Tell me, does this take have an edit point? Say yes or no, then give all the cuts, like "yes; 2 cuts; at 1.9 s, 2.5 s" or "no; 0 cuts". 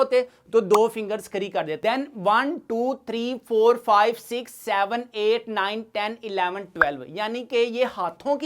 no; 0 cuts